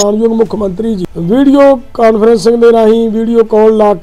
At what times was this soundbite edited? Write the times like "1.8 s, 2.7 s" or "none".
1.1 s